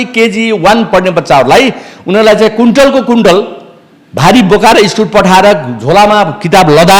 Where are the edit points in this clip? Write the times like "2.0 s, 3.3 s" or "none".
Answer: none